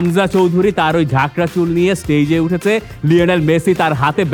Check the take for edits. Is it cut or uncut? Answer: uncut